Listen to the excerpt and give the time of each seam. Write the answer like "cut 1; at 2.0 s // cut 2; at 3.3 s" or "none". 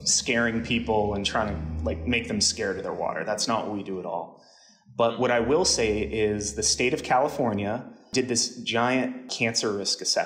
cut 1; at 8.1 s // cut 2; at 9.3 s

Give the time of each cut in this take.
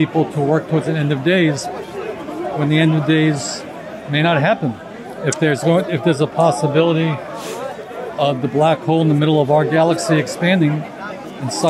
none

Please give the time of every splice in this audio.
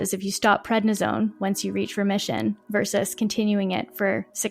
none

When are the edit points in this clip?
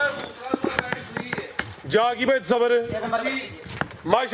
none

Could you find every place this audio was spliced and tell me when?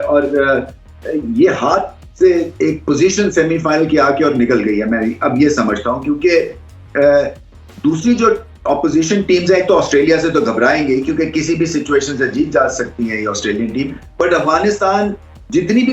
none

